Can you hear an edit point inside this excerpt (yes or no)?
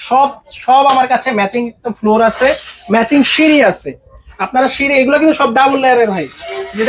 no